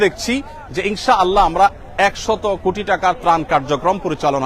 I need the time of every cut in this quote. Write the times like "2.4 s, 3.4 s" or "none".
none